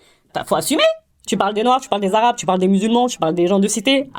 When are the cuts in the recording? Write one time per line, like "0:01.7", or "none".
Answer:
none